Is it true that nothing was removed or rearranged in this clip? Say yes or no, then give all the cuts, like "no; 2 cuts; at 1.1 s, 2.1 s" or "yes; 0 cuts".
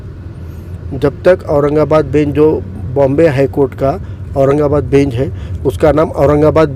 yes; 0 cuts